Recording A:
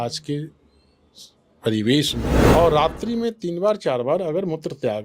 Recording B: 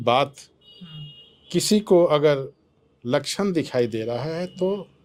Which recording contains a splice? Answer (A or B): A